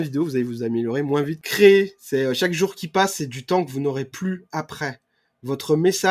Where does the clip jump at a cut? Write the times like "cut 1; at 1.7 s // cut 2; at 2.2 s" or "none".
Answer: cut 1; at 1.4 s